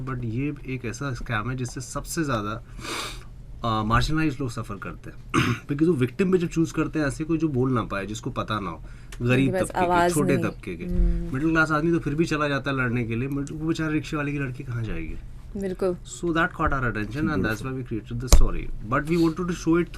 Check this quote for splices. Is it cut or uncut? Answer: uncut